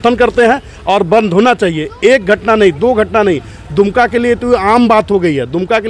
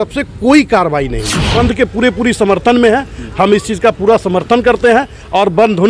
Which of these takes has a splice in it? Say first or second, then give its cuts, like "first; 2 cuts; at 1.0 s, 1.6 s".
second; 1 cut; at 1.5 s